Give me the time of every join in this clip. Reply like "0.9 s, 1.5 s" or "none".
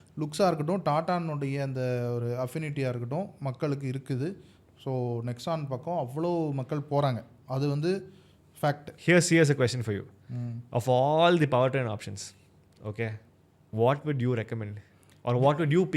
8.9 s